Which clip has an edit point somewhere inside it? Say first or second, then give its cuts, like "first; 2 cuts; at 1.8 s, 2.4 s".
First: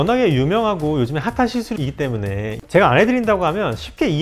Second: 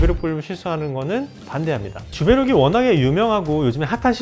first; 1 cut; at 2.6 s